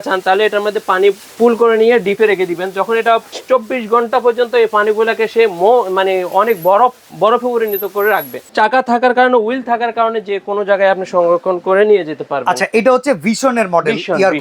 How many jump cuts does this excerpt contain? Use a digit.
3